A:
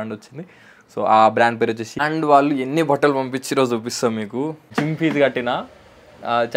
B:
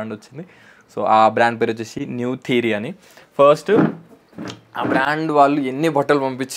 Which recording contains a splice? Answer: A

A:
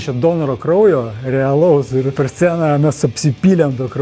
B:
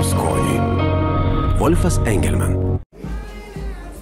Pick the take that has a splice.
A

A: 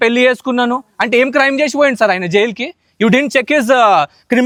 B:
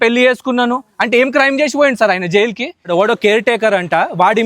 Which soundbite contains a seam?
B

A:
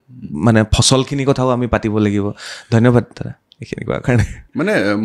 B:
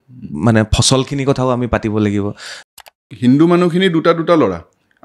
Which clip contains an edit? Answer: B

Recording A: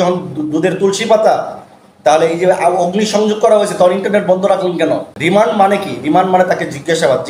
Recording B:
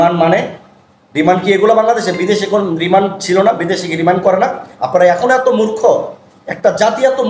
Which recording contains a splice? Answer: A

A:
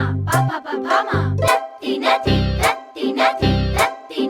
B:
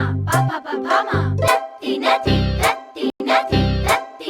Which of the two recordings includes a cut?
A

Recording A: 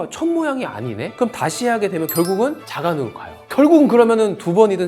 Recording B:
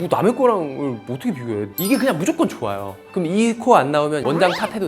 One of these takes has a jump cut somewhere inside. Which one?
B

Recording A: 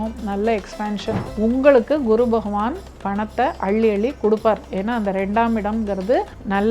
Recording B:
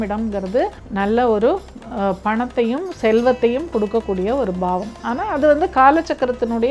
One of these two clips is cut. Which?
A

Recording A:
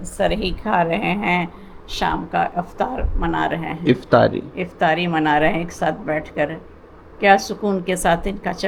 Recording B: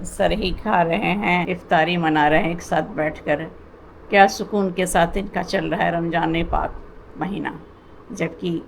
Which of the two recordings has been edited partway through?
B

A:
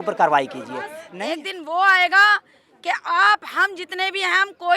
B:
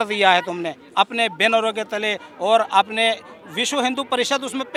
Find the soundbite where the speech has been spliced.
A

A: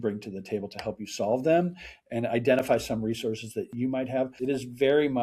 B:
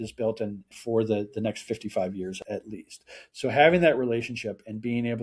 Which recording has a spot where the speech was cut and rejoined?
A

